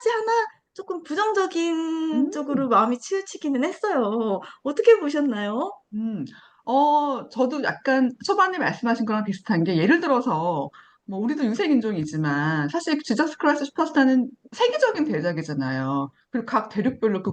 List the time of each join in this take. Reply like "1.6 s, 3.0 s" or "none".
none